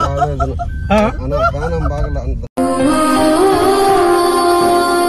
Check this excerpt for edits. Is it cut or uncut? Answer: uncut